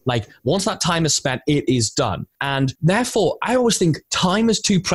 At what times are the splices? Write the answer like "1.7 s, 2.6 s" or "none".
2.6 s